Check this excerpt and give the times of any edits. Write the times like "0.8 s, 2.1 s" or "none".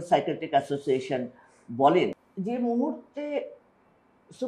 2.2 s

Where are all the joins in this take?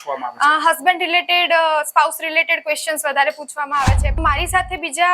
4.2 s

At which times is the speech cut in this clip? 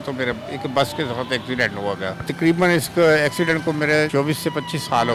2.2 s, 4.1 s

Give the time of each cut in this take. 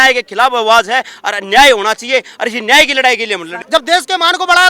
3.6 s

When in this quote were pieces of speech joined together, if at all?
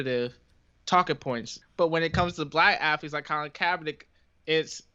1.5 s

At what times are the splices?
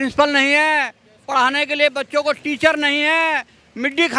none

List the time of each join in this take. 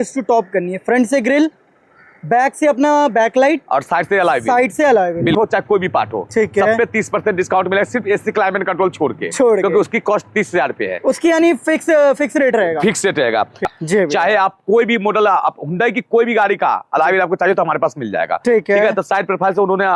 5.3 s, 13.6 s

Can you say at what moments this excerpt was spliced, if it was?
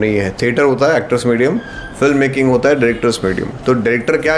none

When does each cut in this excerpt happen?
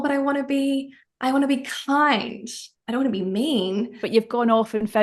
4.0 s

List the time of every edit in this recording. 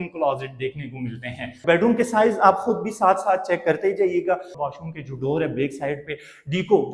1.6 s, 4.5 s

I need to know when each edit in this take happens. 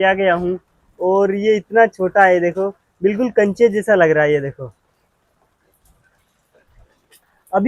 none

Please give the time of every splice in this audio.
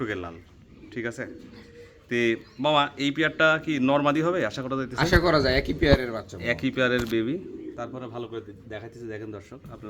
none

